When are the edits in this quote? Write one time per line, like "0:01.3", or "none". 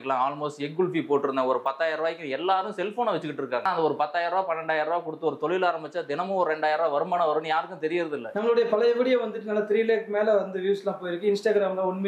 0:03.6
0:08.2